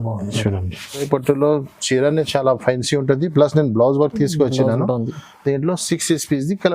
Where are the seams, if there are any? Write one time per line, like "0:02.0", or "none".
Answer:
0:01.0